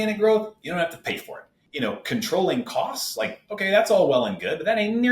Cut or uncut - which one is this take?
cut